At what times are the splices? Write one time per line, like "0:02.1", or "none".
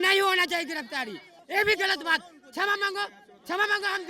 0:01.4